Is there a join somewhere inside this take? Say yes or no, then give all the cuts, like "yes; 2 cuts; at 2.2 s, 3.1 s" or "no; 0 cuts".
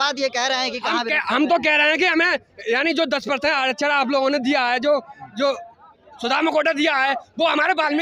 no; 0 cuts